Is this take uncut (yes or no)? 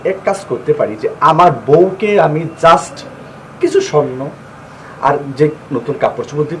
yes